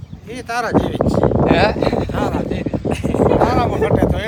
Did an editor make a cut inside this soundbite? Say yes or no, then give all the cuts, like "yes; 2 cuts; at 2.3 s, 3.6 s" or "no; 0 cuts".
no; 0 cuts